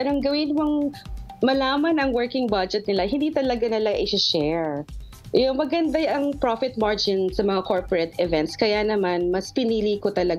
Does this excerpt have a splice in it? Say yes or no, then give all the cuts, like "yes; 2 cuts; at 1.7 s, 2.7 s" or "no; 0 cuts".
no; 0 cuts